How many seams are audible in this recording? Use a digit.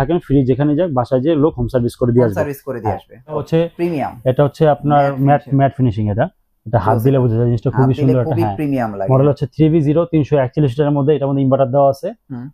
1